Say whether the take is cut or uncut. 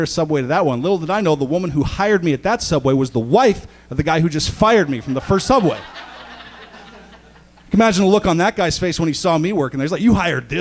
uncut